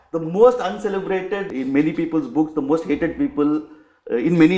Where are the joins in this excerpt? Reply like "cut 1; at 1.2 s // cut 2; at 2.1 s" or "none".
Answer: cut 1; at 1.5 s